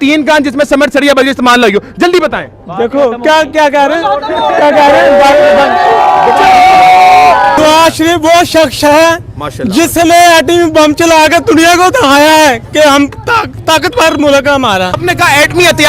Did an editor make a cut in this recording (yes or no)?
yes